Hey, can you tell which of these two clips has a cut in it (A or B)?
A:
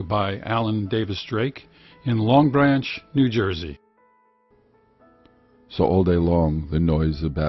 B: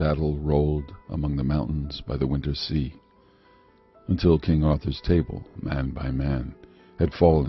B